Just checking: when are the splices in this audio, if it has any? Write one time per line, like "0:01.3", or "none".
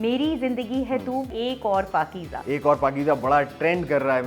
0:01.3
0:02.3